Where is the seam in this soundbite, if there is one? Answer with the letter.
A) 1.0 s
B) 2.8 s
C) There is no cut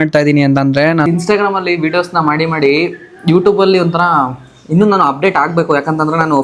A